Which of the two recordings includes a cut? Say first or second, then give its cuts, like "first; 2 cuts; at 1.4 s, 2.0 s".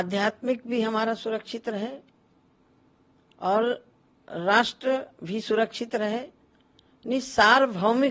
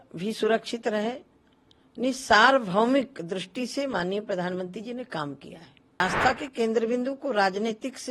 second; 1 cut; at 6.0 s